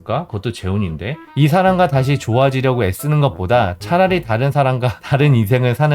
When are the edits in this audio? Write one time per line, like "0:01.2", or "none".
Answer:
0:01.2

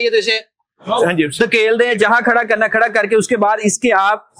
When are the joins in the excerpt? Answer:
none

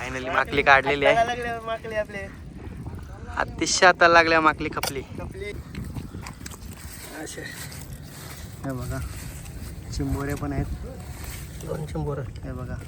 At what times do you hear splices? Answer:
0:05.5

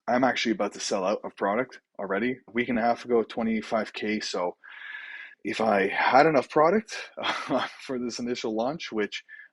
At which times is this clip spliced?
none

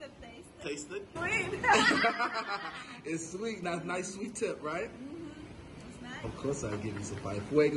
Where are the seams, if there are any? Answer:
0:01.1
0:06.3

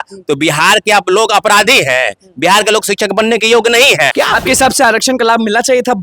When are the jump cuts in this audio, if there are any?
0:04.1

